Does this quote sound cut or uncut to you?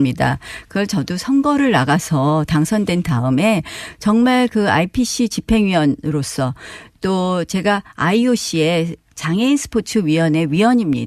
uncut